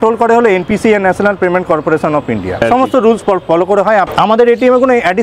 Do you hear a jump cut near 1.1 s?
no; 2 cuts; at 2.6 s, 4.1 s

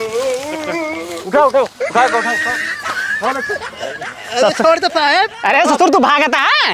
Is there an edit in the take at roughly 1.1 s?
yes; 1 cut; at 1.1 s

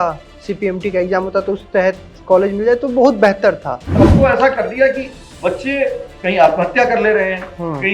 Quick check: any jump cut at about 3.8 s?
yes; 1 cut; at 3.8 s

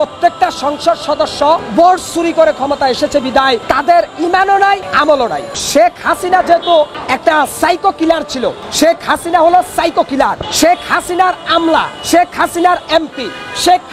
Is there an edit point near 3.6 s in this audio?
yes; 7 cuts; at 1.7 s, 3.6 s, 5.1 s, 7.0 s, 8.6 s, 10.4 s, 12.0 s

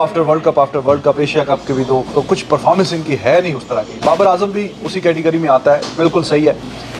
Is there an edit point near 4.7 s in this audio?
no; 0 cuts

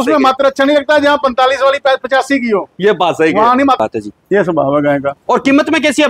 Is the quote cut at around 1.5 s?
no; 1 cut; at 3.8 s

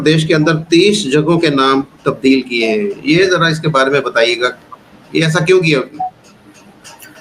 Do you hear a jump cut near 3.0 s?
no; 0 cuts

